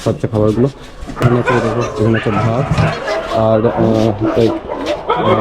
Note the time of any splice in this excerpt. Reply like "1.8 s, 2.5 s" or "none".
1.0 s